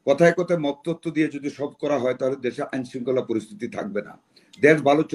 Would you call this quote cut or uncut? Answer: uncut